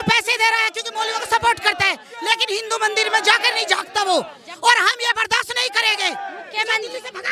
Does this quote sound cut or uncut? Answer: uncut